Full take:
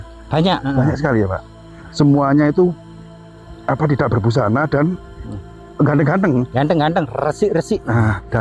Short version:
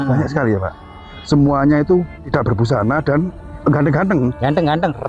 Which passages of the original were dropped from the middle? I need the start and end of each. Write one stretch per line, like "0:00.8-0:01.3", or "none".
0:03.0-0:03.9
0:05.1-0:05.6